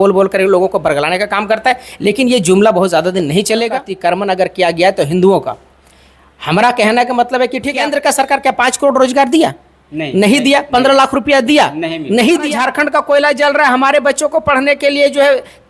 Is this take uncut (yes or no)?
no